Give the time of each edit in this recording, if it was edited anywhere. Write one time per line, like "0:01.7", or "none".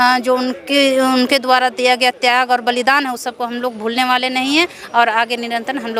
none